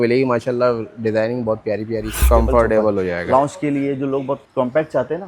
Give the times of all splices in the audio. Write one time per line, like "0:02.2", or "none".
0:02.2
0:04.5